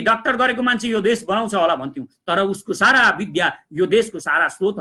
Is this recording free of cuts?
yes; 0 cuts

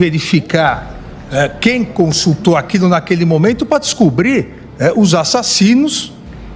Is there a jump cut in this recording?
no; 0 cuts

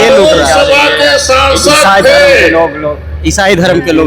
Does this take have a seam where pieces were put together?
no; 0 cuts

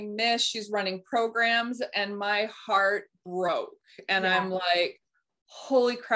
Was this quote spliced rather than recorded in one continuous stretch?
no; 0 cuts

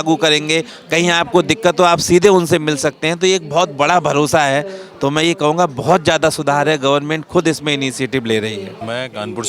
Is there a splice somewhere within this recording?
no; 0 cuts

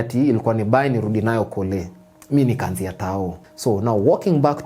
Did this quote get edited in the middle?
yes; 1 cut; at 3.4 s

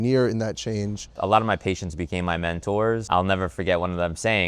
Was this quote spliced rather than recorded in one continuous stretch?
yes; 2 cuts; at 1.2 s, 3.0 s

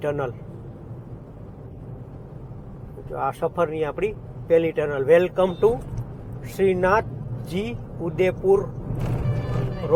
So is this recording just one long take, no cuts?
yes; 0 cuts

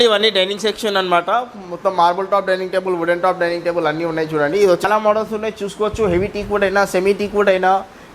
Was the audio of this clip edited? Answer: yes; 1 cut; at 4.8 s

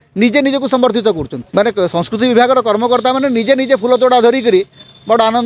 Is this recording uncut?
no; 1 cut; at 1.3 s

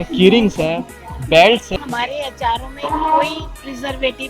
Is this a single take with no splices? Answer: no; 1 cut; at 1.7 s

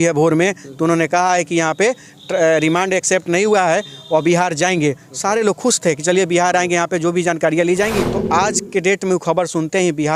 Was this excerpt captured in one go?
no; 1 cut; at 8.1 s

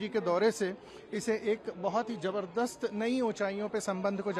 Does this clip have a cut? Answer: no; 0 cuts

